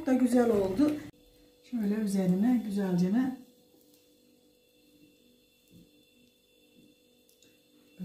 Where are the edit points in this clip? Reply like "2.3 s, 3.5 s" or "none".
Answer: 1.1 s